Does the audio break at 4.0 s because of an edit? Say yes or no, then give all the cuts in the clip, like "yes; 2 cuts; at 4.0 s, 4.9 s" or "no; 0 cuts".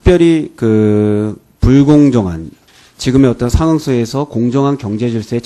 no; 1 cut; at 2.3 s